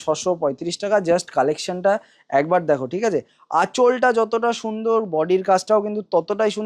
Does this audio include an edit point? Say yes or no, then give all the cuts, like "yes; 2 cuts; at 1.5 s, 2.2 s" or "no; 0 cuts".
no; 0 cuts